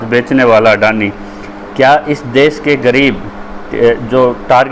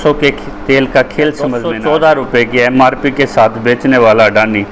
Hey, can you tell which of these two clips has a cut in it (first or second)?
second